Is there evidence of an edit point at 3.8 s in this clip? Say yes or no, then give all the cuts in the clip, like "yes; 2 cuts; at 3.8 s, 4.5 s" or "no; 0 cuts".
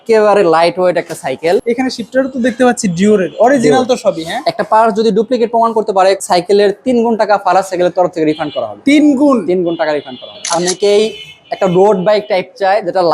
no; 3 cuts; at 2.0 s, 6.2 s, 10.4 s